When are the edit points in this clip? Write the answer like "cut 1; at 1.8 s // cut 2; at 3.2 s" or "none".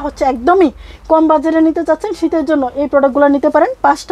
none